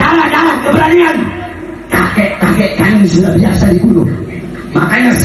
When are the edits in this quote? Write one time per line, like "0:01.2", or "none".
none

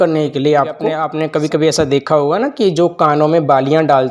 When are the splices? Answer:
0:01.0

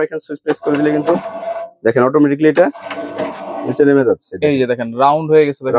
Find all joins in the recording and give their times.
none

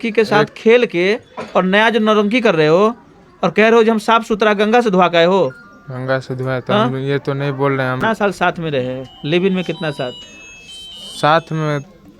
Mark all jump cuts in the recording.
0:08.0

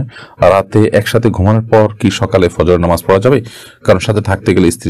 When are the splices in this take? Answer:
none

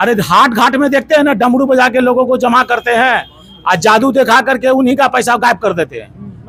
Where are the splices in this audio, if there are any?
none

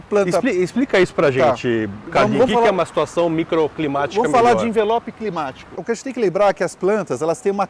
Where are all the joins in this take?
0:05.8

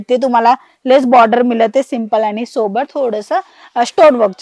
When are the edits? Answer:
none

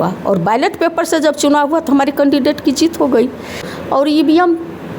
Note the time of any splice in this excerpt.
0:03.7

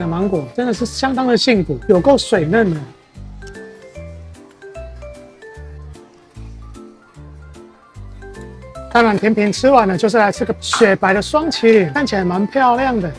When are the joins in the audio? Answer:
none

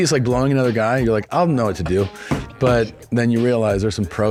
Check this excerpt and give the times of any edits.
none

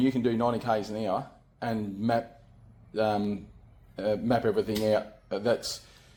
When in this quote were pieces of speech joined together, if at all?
none

